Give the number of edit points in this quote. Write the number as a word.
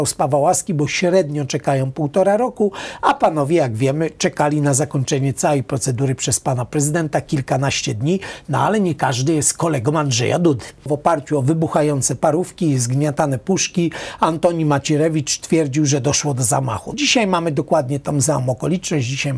two